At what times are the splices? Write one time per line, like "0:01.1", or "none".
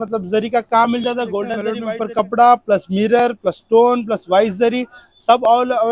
0:01.7